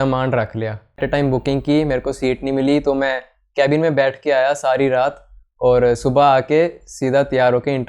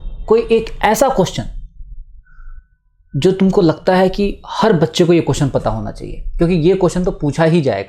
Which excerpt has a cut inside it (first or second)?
first